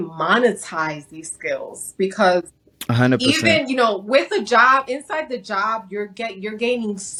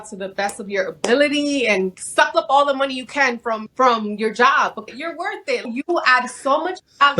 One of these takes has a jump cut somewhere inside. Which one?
second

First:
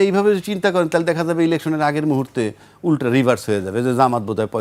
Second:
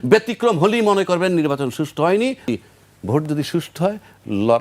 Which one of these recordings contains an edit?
second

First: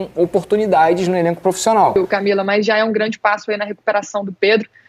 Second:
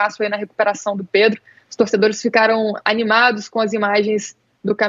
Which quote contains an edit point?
first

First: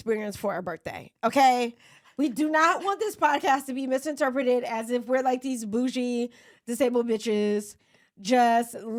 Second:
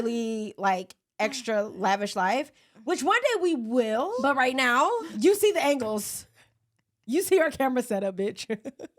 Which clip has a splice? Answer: second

